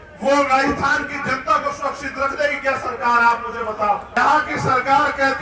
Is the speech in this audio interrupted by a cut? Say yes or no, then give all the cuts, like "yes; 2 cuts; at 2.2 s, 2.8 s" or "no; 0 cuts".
yes; 1 cut; at 4.1 s